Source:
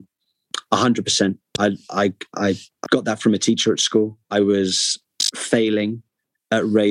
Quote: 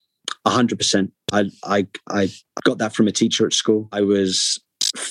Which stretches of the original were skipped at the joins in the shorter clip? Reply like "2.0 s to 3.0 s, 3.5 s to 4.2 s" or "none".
4.1 s to 4.3 s